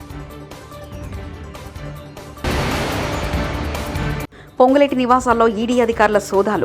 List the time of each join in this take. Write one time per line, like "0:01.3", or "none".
0:01.5